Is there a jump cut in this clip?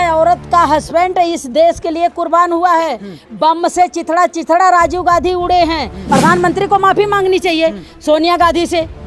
yes; 1 cut; at 6.0 s

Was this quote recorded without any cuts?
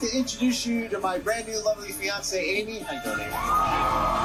yes; 0 cuts

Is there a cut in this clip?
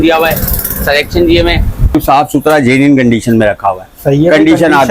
yes; 1 cut; at 1.9 s

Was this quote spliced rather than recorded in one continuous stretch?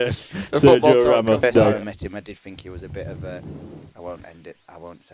yes; 1 cut; at 1.8 s

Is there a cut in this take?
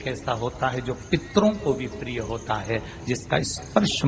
no; 0 cuts

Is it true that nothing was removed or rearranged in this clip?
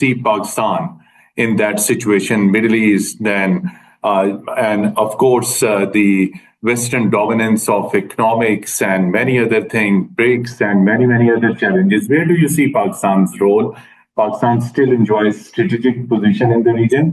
yes; 0 cuts

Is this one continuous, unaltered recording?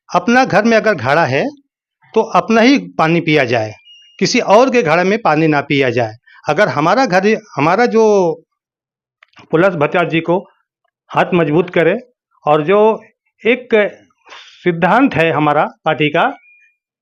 yes; 0 cuts

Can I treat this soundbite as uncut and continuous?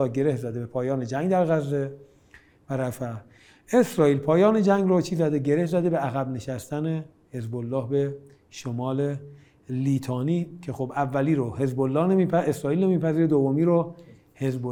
yes; 0 cuts

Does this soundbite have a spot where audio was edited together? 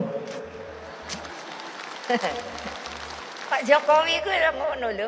no; 0 cuts

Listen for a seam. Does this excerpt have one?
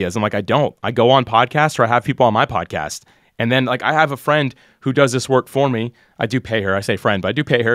no; 0 cuts

